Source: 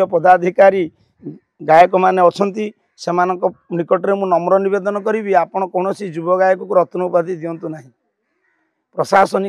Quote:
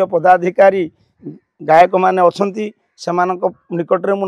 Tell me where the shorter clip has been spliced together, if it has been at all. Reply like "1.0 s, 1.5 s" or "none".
none